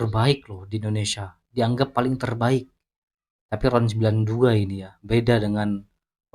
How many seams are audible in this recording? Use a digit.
0